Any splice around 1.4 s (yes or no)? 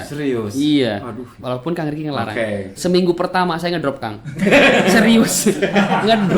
yes